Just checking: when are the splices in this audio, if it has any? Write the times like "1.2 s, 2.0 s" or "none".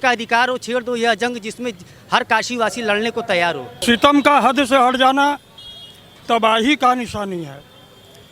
3.7 s